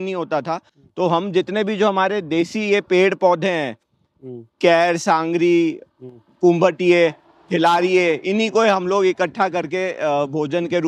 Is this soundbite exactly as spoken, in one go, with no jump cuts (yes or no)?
yes